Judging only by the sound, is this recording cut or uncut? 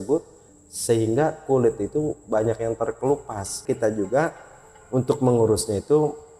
cut